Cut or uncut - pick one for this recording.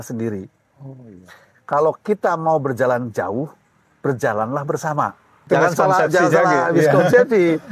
cut